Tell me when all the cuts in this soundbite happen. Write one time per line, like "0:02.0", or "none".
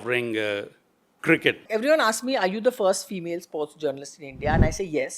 0:01.7